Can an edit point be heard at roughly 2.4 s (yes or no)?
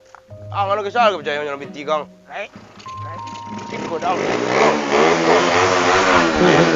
no